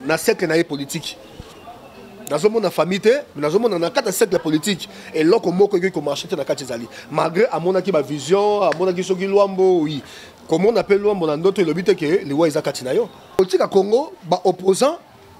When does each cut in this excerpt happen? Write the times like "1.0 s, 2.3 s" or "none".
13.4 s